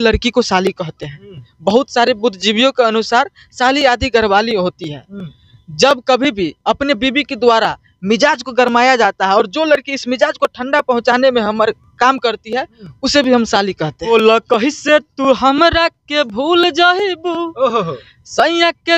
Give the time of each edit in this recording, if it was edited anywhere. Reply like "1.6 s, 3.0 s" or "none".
14.0 s